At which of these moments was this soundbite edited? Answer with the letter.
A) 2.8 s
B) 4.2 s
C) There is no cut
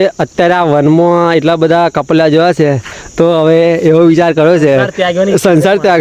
C